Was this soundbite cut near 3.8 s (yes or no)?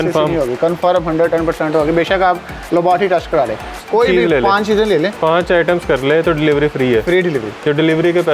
yes